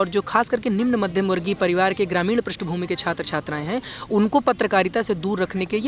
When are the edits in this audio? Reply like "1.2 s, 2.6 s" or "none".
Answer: none